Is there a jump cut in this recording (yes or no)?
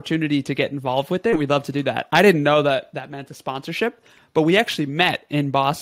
no